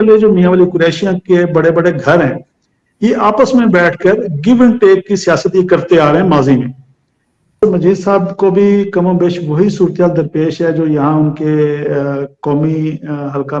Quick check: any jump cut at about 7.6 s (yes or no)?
yes